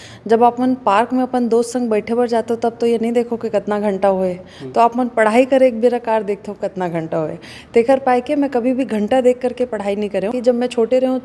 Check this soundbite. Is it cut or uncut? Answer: cut